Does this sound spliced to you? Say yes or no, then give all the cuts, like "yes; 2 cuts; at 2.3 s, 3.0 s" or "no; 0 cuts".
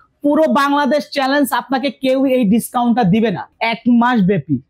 yes; 1 cut; at 3.5 s